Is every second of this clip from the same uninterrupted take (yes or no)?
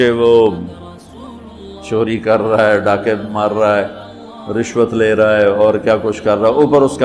yes